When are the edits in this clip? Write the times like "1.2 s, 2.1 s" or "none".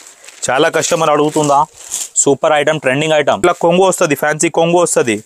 3.4 s